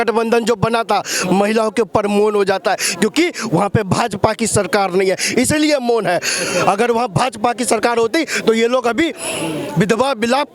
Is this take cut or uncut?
uncut